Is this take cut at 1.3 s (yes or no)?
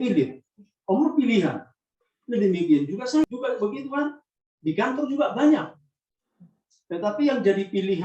no